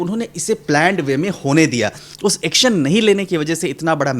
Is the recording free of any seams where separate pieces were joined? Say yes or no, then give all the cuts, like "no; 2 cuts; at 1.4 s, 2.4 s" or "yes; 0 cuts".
no; 1 cut; at 2.1 s